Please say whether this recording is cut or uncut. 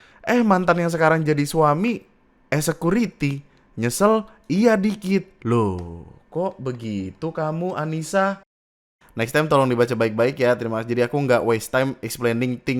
cut